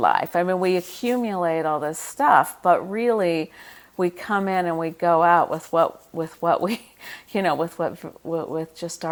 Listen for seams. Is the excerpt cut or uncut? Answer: uncut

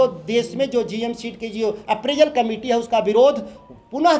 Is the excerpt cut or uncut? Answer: uncut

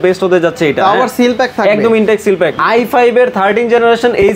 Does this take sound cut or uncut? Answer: cut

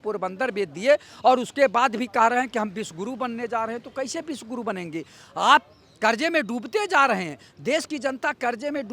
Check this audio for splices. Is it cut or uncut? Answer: uncut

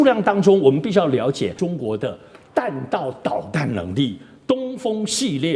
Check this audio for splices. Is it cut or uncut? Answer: cut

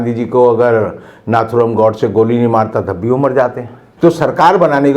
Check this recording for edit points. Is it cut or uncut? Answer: cut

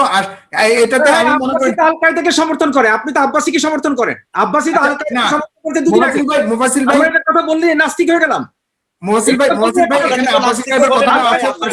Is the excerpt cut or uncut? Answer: uncut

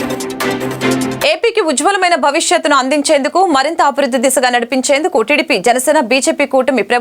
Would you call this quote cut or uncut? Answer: cut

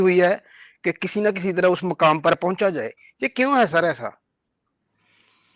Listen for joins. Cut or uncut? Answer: uncut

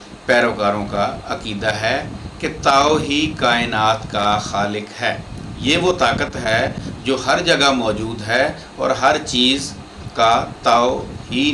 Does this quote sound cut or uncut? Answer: uncut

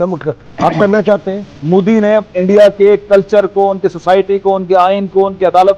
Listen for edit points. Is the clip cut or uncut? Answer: cut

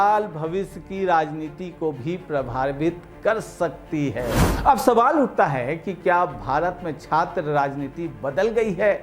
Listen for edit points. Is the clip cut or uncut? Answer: cut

